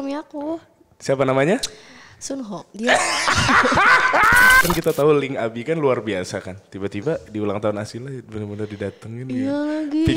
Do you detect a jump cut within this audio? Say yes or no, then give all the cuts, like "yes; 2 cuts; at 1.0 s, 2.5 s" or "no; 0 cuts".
yes; 1 cut; at 4.6 s